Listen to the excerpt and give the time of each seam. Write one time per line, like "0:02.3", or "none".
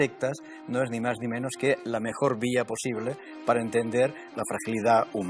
0:04.3